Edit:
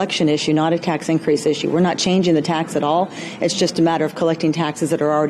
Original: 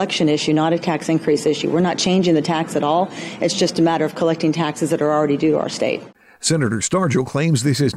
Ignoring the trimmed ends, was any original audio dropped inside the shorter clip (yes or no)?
no